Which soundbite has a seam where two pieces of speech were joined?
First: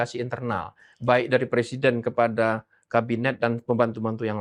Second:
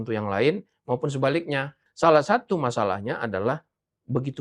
second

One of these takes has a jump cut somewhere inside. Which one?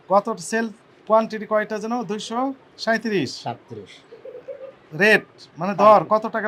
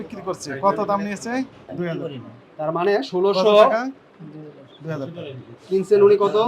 second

